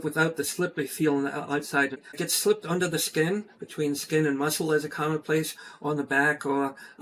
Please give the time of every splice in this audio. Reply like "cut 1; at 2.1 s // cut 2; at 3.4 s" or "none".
cut 1; at 2.3 s